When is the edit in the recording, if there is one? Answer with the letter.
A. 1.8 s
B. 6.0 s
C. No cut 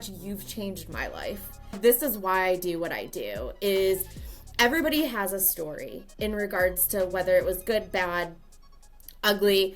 A